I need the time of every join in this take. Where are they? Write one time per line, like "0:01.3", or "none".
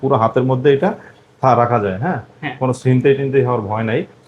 none